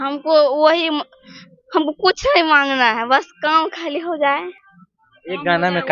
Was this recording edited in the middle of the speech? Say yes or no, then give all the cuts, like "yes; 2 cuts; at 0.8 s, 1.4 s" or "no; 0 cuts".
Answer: no; 0 cuts